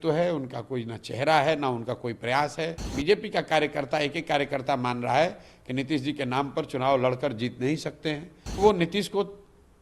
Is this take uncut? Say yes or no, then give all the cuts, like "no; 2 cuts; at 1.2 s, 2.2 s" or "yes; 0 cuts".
no; 2 cuts; at 2.9 s, 8.4 s